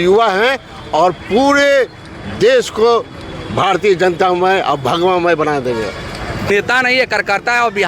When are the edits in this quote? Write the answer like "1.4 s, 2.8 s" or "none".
6.5 s